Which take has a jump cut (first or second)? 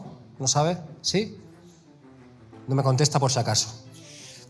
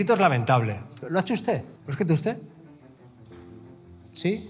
second